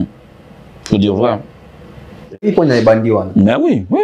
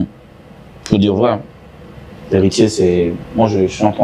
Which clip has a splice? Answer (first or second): first